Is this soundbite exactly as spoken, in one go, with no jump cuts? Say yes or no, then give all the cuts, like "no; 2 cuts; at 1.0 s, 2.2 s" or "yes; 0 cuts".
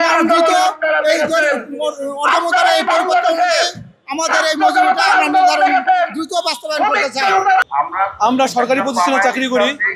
no; 1 cut; at 7.6 s